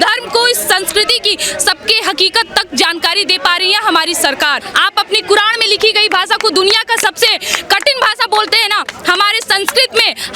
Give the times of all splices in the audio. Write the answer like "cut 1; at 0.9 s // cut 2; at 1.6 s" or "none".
cut 1; at 4.7 s